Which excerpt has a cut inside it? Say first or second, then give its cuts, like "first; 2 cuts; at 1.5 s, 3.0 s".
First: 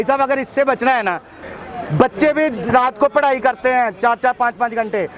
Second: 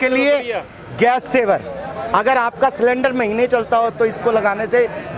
first; 1 cut; at 1.5 s